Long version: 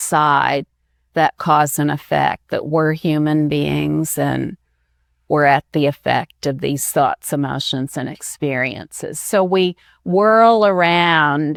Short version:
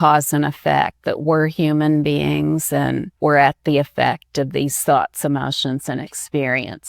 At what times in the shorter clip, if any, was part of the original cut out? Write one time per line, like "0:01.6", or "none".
0:03.1